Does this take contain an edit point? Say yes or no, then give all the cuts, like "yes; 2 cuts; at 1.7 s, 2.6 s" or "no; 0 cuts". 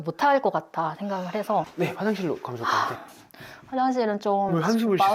yes; 1 cut; at 1.7 s